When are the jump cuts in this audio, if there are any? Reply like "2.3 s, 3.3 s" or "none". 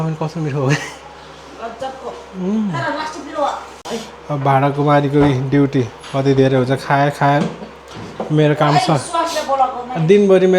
3.7 s